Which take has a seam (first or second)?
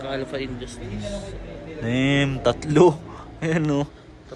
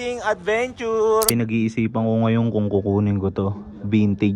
second